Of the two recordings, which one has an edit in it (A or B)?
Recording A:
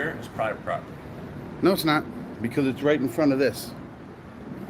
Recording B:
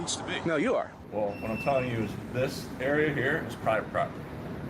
B